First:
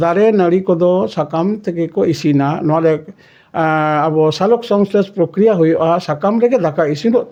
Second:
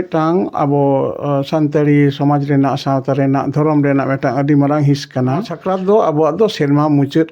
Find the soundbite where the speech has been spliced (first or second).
second